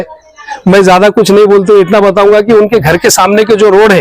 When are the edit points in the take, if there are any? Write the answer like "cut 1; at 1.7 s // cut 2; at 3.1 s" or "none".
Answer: none